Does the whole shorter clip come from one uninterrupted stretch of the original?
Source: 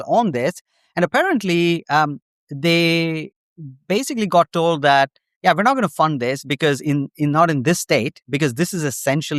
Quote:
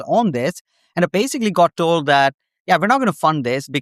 no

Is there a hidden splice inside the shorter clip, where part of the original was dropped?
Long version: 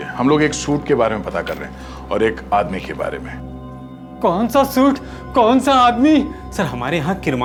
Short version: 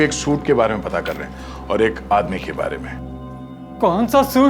no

